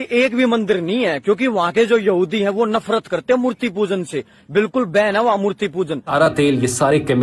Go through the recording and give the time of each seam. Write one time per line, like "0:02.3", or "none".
0:06.1